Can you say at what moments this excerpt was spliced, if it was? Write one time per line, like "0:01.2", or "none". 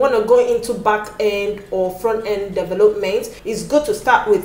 0:03.3